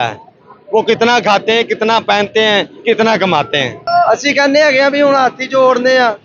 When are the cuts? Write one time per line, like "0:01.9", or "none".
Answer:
0:03.8